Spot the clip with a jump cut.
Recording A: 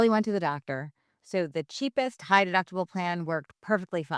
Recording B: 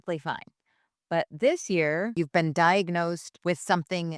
B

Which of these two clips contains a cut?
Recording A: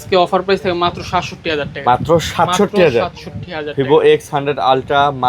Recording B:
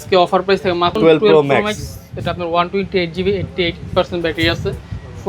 B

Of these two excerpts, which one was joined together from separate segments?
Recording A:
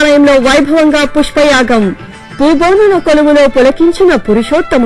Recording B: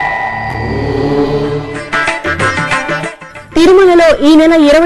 B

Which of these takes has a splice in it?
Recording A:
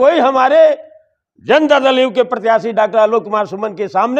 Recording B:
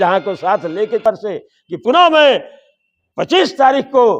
B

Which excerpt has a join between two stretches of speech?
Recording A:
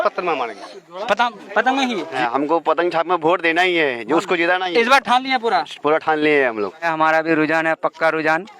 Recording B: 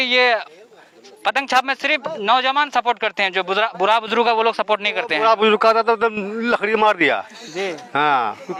A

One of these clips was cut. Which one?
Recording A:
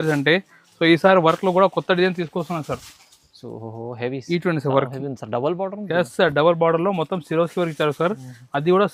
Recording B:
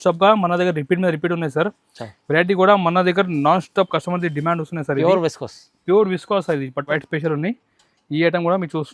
B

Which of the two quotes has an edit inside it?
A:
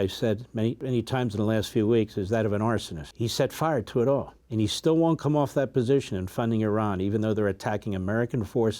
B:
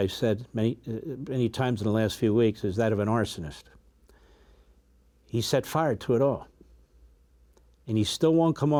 A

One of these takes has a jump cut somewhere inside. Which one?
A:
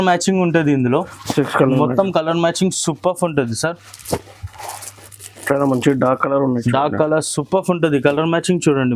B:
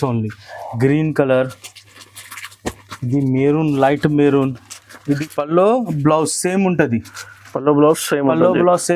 B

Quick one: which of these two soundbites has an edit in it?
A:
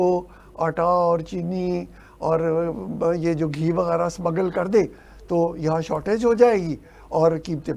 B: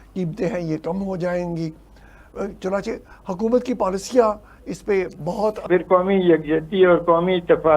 B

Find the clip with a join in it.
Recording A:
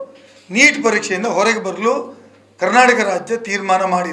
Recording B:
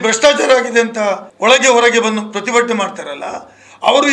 B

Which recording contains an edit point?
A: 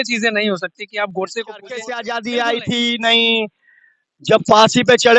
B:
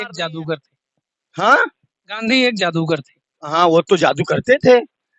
A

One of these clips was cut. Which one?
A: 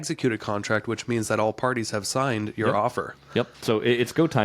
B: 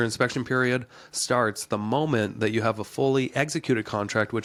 A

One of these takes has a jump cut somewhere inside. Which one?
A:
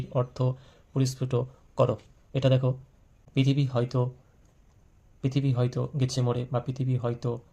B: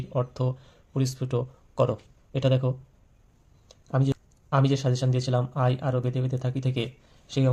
A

